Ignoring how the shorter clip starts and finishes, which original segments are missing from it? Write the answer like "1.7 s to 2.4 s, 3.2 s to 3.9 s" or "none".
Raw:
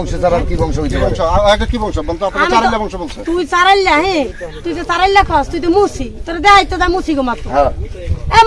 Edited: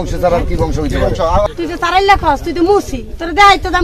1.4 s to 4.5 s